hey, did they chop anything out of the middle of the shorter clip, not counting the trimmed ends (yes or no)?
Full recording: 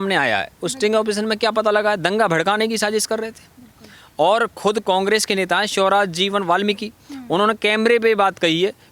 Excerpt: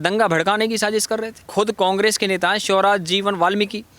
yes